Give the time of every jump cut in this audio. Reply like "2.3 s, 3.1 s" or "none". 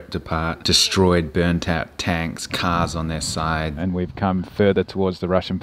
3.8 s